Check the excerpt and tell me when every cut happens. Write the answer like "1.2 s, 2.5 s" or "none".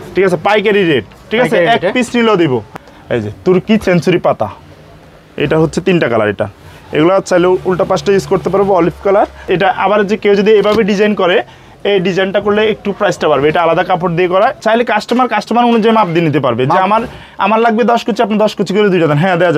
2.7 s, 9.4 s, 14.6 s